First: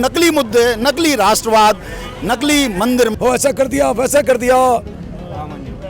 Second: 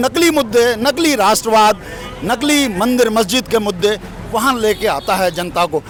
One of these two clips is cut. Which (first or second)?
first